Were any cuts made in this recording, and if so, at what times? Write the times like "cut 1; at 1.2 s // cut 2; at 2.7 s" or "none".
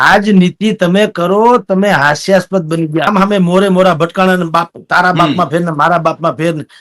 cut 1; at 3.1 s